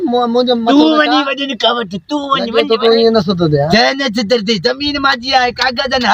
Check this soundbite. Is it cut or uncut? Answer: cut